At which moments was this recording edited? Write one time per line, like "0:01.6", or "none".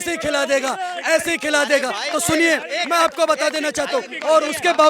none